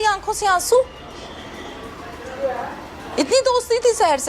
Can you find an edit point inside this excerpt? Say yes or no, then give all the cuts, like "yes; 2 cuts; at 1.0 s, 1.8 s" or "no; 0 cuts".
no; 0 cuts